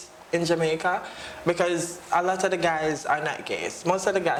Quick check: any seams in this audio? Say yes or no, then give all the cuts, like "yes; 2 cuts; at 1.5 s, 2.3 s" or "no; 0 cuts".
no; 0 cuts